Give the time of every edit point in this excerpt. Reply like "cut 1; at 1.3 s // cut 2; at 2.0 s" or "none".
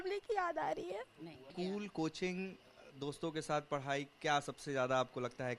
cut 1; at 1.5 s